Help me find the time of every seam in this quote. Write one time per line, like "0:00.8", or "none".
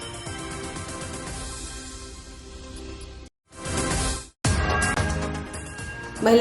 0:02.5